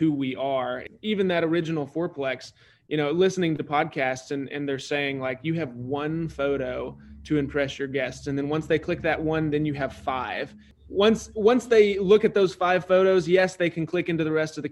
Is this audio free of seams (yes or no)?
no